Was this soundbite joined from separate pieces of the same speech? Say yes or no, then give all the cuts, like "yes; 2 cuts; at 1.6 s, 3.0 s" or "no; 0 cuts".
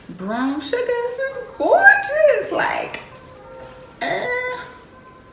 yes; 1 cut; at 1.2 s